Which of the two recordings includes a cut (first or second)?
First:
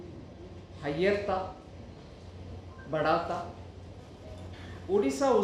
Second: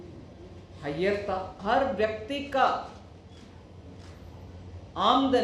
second